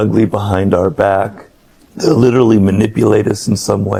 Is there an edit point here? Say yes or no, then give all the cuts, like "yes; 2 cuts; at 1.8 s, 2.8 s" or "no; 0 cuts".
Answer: no; 0 cuts